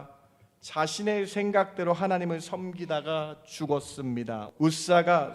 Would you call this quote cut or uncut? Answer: cut